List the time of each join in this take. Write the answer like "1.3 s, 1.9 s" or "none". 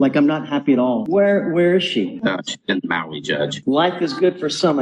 1.0 s, 3.6 s